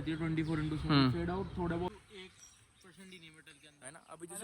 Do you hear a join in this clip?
yes; 1 cut; at 1.9 s

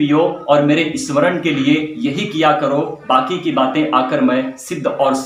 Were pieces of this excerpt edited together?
no; 0 cuts

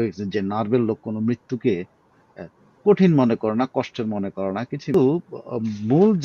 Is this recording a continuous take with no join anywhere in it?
no; 1 cut; at 4.9 s

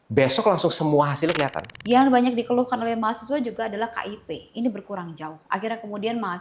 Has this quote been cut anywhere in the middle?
yes; 1 cut; at 1.6 s

